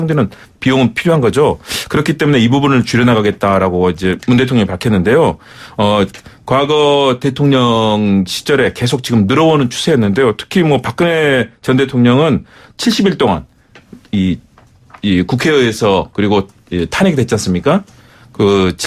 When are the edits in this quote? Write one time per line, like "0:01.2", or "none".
0:08.3